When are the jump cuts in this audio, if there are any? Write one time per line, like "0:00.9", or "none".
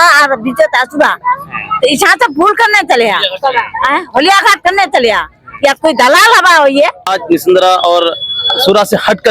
0:07.0